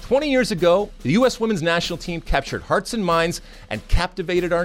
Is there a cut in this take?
yes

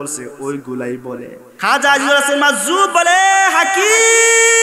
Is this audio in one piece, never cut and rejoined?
no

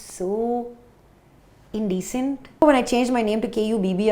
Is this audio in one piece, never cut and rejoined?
no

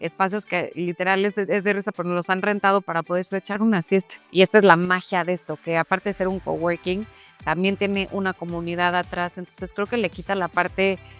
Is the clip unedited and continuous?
no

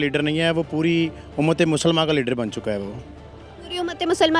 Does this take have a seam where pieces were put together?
no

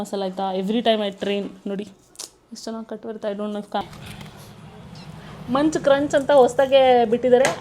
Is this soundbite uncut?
no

